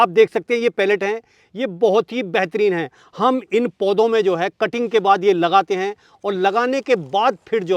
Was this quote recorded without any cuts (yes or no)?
yes